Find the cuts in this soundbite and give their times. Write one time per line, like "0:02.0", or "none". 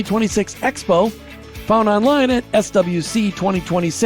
none